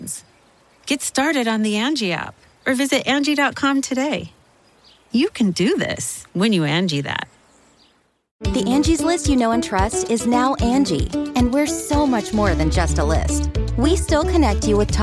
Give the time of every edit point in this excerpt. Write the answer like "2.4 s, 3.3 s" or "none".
8.3 s